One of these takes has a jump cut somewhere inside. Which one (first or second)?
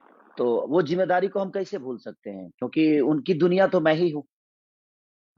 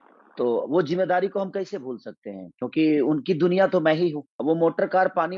second